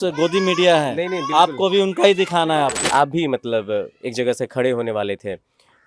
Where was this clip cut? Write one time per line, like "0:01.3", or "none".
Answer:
0:02.8